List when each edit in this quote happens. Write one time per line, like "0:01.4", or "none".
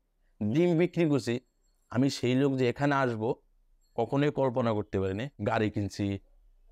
0:05.3